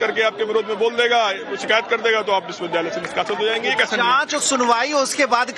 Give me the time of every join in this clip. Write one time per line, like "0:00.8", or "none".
none